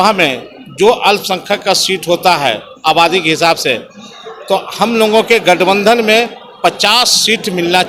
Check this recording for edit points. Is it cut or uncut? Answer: uncut